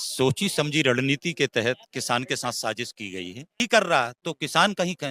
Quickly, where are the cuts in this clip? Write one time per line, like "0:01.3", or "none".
0:03.6